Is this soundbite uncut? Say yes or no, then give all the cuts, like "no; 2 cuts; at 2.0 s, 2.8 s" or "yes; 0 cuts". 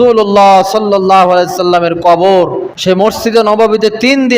no; 1 cut; at 2.7 s